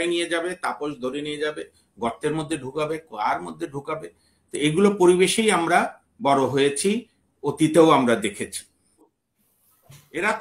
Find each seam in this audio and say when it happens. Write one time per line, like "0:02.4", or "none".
0:09.1